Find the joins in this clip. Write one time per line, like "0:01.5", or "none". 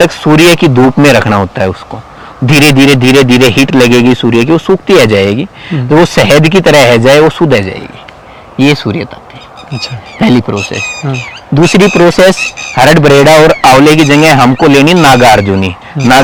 none